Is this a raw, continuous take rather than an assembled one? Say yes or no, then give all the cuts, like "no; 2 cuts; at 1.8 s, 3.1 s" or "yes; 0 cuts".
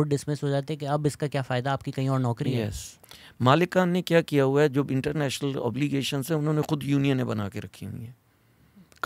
no; 1 cut; at 2.9 s